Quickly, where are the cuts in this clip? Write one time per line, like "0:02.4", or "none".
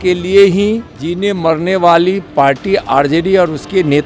0:01.0